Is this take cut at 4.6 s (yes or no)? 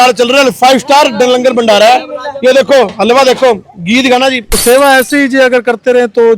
yes